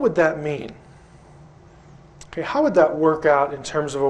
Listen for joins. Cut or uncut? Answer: uncut